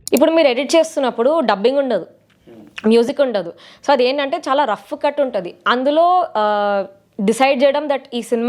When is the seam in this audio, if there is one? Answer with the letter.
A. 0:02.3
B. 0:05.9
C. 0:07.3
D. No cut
D